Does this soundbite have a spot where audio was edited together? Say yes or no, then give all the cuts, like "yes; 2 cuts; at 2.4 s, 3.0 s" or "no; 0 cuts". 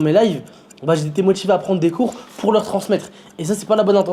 no; 0 cuts